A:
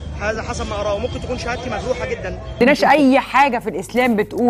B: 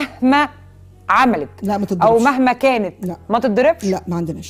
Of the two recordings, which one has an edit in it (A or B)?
A